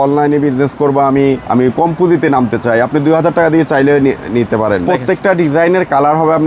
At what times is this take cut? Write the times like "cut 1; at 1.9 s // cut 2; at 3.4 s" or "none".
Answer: cut 1; at 1.4 s // cut 2; at 4.8 s